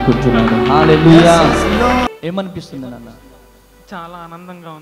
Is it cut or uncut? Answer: cut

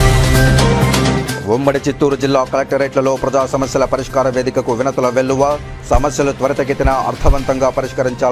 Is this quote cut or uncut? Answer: uncut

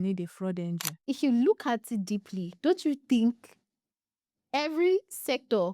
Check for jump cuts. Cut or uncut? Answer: cut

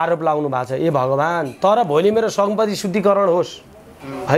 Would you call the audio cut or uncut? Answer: uncut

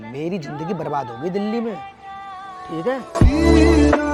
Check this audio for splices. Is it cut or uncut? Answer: uncut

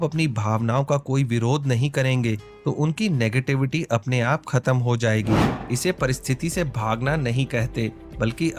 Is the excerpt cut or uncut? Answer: cut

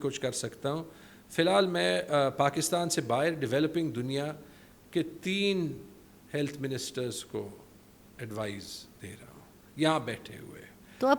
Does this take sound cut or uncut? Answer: uncut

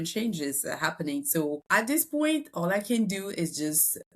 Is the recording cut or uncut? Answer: cut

